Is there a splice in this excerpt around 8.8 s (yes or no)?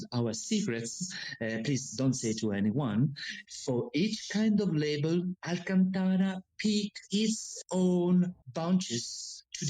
no